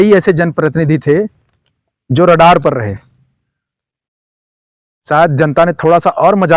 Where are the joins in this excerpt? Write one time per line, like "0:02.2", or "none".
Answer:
none